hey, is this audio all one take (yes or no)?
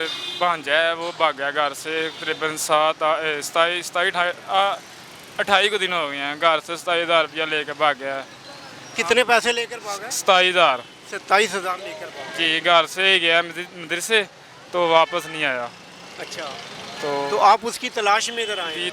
yes